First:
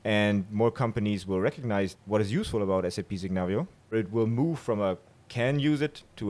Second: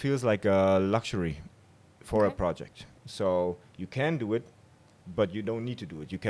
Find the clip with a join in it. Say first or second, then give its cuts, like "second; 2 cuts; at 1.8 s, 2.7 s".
first; 2 cuts; at 1.9 s, 3.9 s